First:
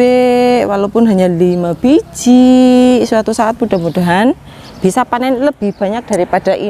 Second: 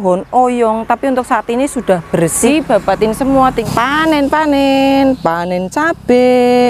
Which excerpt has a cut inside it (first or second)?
second